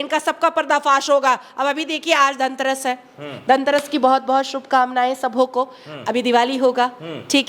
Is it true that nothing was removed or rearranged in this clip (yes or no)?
yes